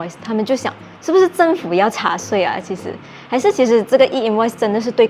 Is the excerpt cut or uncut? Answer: uncut